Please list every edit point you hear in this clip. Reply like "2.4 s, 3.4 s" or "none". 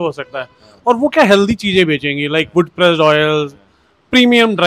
none